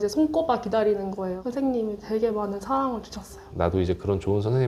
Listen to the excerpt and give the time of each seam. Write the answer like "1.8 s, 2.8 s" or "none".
1.3 s, 3.5 s